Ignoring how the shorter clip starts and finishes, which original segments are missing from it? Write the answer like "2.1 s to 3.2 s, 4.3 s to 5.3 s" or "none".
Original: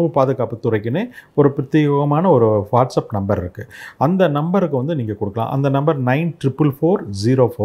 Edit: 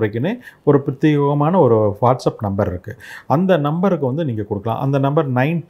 none